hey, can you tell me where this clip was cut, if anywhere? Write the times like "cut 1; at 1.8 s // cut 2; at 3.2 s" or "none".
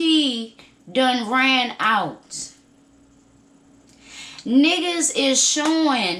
none

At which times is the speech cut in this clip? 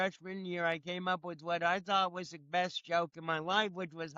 none

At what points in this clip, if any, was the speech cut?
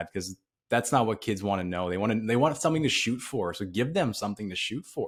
none

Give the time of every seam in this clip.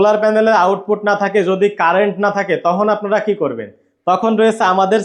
none

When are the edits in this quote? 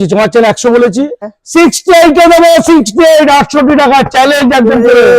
cut 1; at 1.2 s

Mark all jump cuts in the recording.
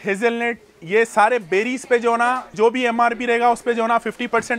cut 1; at 2.5 s

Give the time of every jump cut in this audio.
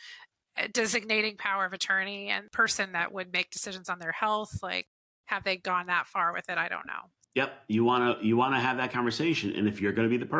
cut 1; at 2.5 s

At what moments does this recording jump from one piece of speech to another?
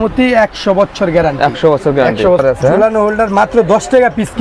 cut 1; at 2.4 s

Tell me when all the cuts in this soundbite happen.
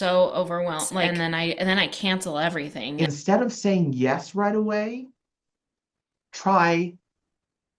cut 1; at 1.1 s // cut 2; at 2.8 s

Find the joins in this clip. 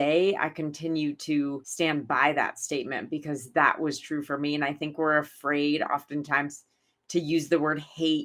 cut 1; at 1.6 s

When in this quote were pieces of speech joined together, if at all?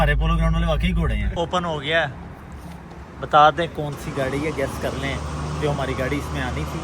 cut 1; at 1.3 s

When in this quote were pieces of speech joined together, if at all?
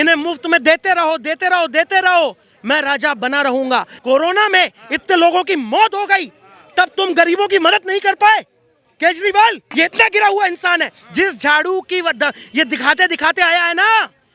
cut 1; at 4.0 s // cut 2; at 9.6 s

